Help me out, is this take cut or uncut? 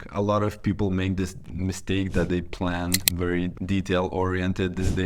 cut